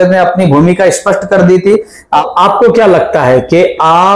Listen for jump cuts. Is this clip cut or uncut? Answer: cut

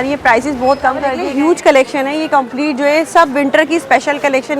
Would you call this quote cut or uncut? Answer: cut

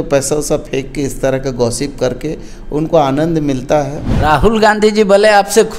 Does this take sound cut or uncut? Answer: cut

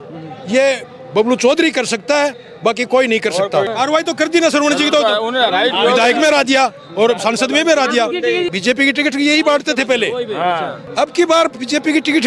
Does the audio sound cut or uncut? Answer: cut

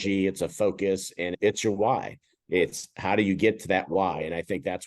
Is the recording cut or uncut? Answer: uncut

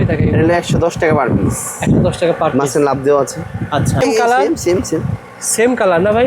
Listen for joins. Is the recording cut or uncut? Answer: cut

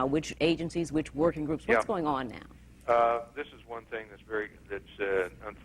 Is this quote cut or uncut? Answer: uncut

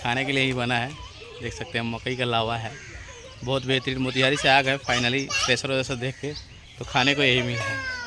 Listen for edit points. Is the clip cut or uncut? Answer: uncut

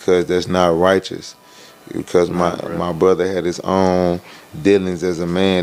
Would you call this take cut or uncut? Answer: uncut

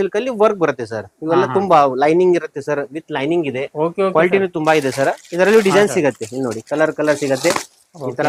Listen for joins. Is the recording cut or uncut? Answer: uncut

